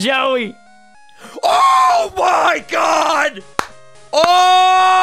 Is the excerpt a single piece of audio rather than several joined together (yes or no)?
yes